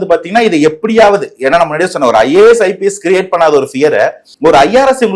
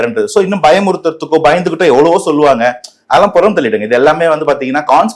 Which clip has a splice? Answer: first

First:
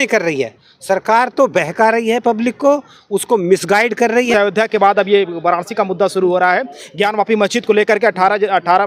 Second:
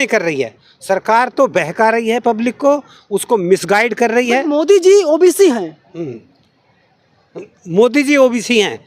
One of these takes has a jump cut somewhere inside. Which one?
first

